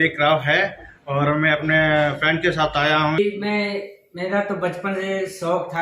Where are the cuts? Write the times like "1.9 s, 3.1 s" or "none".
3.2 s